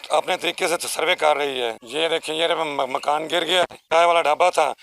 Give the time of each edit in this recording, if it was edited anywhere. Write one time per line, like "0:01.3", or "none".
0:01.8
0:03.8